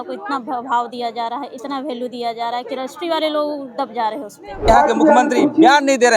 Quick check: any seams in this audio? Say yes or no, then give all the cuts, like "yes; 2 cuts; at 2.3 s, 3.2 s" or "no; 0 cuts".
yes; 1 cut; at 4.6 s